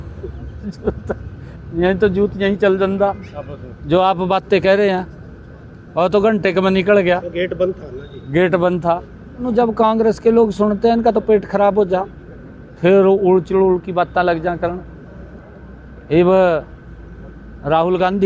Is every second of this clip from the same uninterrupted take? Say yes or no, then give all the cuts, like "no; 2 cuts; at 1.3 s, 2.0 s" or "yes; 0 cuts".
no; 1 cut; at 9.5 s